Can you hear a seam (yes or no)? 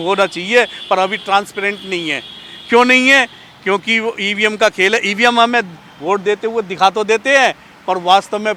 no